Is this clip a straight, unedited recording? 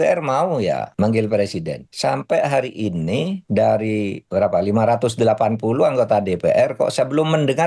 no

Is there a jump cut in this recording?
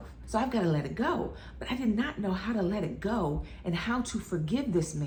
no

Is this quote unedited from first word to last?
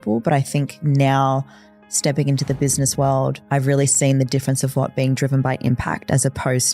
no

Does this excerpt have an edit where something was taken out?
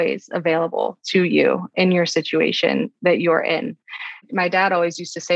no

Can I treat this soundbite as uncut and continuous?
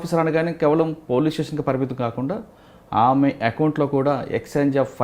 yes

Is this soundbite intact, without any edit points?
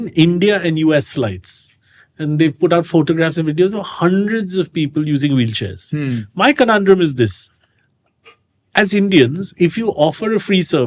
yes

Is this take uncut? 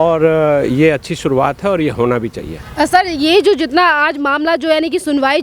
yes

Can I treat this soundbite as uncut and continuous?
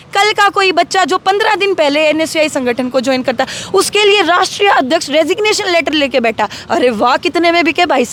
yes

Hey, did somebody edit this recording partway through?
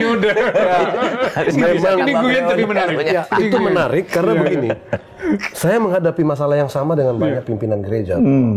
no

